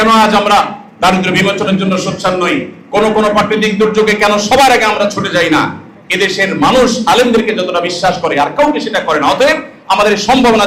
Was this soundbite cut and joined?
no; 0 cuts

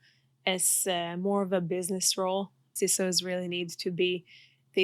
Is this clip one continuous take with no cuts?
no; 1 cut; at 2.7 s

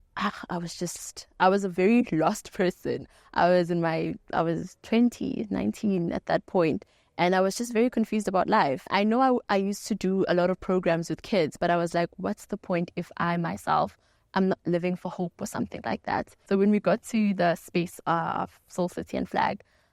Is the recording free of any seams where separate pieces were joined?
yes; 0 cuts

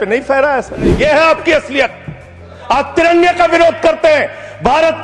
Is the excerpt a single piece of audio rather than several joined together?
no; 1 cut; at 0.9 s

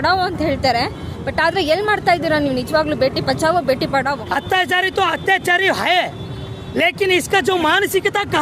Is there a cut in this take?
yes; 1 cut; at 4.2 s

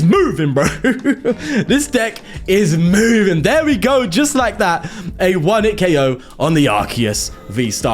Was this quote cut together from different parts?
no; 0 cuts

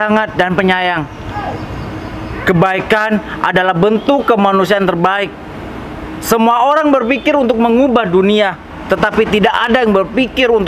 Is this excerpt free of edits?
yes; 0 cuts

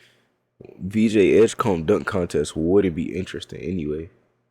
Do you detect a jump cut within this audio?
no; 0 cuts

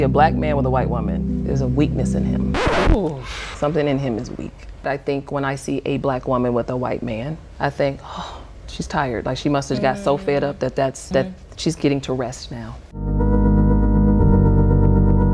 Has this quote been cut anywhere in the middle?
no; 0 cuts

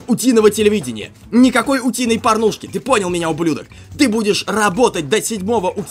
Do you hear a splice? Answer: no; 0 cuts

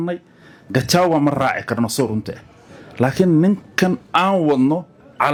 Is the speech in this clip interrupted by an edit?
no; 0 cuts

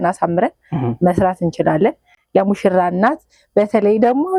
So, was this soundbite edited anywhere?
no; 0 cuts

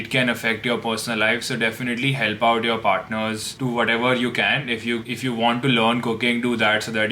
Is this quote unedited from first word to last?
yes; 0 cuts

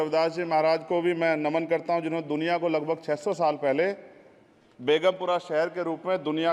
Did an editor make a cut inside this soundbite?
no; 0 cuts

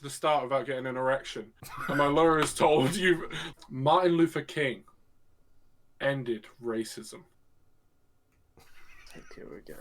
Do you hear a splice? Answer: yes; 1 cut; at 3.4 s

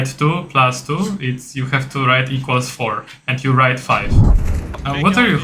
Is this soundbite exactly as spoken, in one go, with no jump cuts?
no; 1 cut; at 4.4 s

